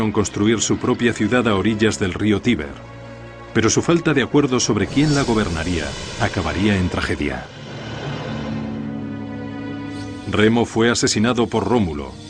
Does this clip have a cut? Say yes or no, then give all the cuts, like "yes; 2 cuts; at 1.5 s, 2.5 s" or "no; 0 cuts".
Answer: no; 0 cuts